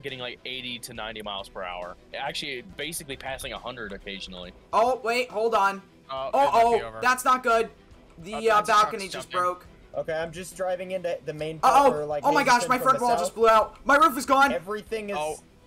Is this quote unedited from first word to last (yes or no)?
no